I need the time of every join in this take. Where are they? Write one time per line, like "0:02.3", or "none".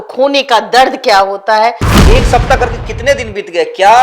0:01.9